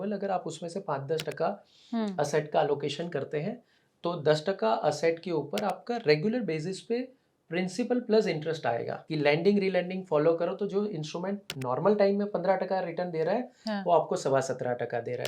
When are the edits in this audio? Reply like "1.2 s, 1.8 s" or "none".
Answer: 9.0 s